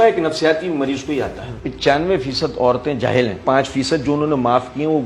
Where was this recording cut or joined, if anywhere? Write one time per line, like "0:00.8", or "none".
0:01.7
0:03.4